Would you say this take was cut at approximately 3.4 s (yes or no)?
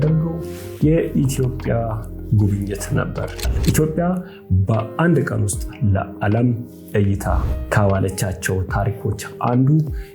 yes